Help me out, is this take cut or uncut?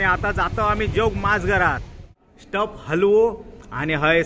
cut